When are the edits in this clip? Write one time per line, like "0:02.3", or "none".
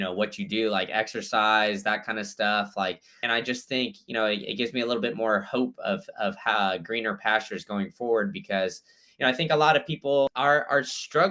0:03.1
0:10.3